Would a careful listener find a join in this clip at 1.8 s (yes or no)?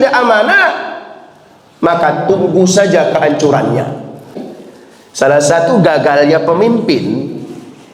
no